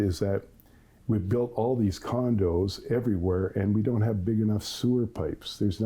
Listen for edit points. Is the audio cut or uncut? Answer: uncut